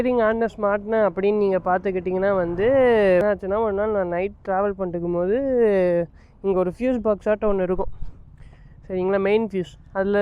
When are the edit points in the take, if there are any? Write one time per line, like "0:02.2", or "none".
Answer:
0:03.2